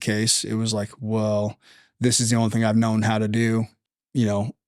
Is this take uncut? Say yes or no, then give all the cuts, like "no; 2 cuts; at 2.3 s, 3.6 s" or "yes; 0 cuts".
no; 1 cut; at 3.8 s